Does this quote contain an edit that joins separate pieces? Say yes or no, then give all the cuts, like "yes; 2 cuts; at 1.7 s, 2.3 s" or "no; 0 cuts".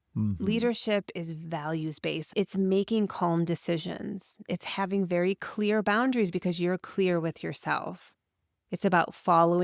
yes; 1 cut; at 2.2 s